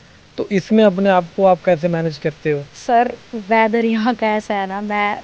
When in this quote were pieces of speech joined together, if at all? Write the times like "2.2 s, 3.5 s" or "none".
2.7 s